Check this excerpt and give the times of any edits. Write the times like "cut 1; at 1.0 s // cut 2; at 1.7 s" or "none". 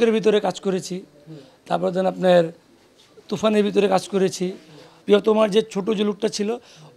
cut 1; at 4.9 s